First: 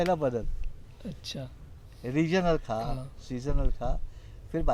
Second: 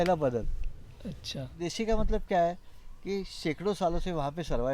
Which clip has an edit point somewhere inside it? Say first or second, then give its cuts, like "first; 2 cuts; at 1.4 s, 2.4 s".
second; 1 cut; at 1.6 s